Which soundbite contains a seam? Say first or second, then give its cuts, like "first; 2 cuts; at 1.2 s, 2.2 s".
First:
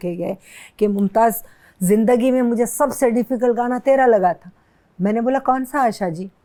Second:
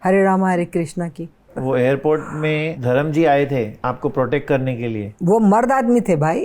second; 4 cuts; at 1.5 s, 2.7 s, 3.7 s, 5.0 s